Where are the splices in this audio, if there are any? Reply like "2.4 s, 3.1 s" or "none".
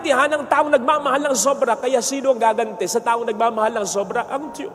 none